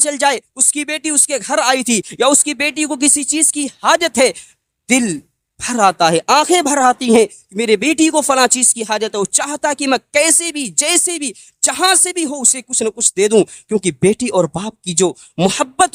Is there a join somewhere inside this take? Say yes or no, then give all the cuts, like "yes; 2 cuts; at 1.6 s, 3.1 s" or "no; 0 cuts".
no; 0 cuts